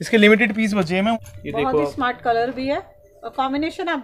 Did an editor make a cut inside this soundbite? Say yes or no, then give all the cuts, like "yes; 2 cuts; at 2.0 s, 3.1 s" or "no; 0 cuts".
yes; 1 cut; at 1.2 s